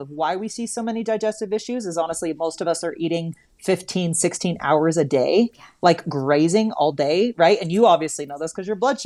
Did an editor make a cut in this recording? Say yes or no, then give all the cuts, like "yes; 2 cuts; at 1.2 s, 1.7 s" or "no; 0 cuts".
no; 0 cuts